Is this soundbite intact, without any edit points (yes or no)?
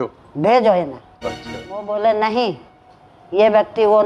no